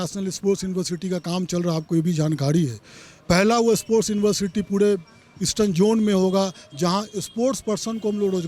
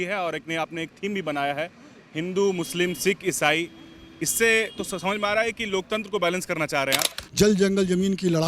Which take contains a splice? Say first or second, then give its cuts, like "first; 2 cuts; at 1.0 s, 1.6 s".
second; 1 cut; at 7.2 s